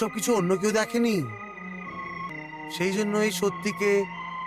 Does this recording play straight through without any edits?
no; 1 cut; at 2.3 s

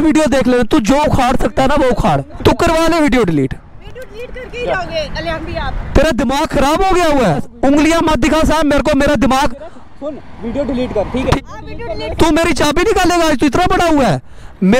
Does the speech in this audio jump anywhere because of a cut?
yes; 3 cuts; at 2.3 s, 7.5 s, 11.4 s

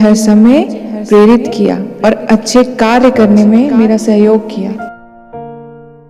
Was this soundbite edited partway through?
yes; 1 cut; at 4.8 s

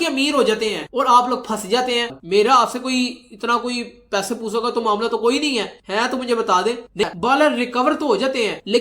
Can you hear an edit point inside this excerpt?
yes; 2 cuts; at 2.1 s, 7.1 s

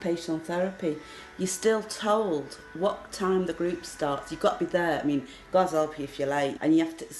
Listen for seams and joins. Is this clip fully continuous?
yes; 0 cuts

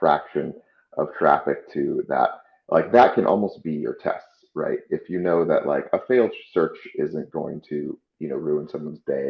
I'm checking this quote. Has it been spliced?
no; 0 cuts

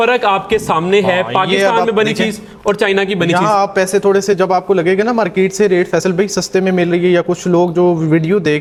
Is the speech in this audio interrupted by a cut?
no; 0 cuts

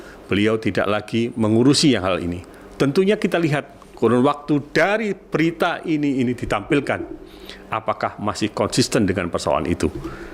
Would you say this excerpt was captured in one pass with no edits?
yes; 0 cuts

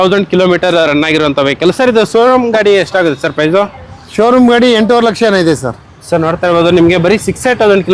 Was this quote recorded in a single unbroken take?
yes; 0 cuts

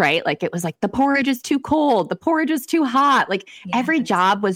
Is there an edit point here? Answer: no; 0 cuts

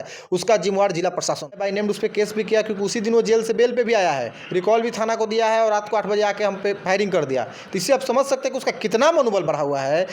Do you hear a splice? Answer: yes; 1 cut; at 1.6 s

